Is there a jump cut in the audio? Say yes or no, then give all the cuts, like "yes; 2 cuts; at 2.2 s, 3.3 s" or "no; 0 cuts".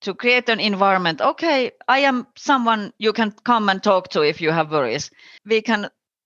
yes; 1 cut; at 5.3 s